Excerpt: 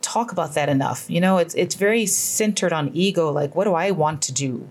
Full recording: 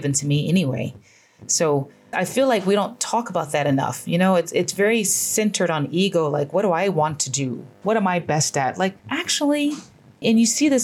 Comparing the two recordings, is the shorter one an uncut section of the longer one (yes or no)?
yes